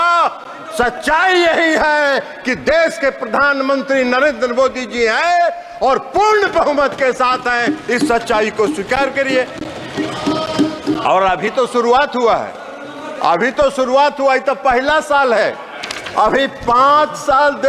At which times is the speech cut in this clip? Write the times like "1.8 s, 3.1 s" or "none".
none